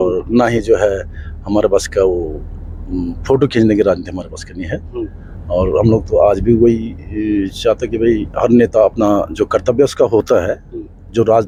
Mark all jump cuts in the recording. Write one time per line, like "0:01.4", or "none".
none